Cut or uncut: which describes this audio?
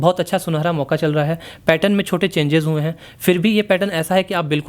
uncut